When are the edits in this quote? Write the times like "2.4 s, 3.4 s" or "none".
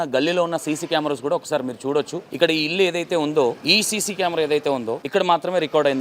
2.2 s, 3.6 s, 5.0 s